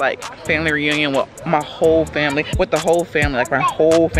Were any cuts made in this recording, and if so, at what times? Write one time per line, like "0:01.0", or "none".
0:02.5